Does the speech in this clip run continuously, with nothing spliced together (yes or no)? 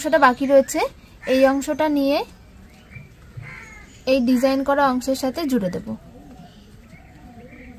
yes